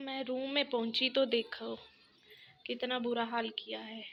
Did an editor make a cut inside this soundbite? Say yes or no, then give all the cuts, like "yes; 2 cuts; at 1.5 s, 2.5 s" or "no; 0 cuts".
no; 0 cuts